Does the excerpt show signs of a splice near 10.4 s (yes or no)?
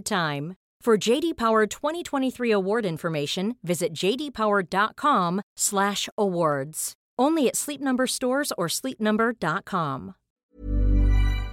yes